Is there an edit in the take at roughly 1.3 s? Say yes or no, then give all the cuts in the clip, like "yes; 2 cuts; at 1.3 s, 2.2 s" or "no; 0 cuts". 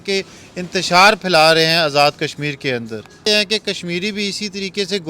no; 1 cut; at 3.2 s